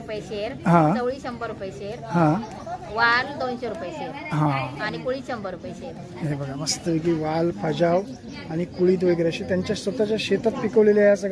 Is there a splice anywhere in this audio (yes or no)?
no